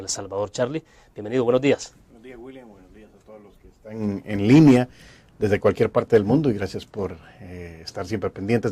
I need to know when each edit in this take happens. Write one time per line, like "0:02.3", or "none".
0:03.5